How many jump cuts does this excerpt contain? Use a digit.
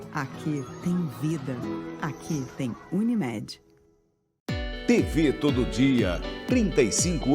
1